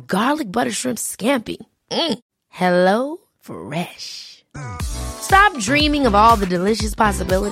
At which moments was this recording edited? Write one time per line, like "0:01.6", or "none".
none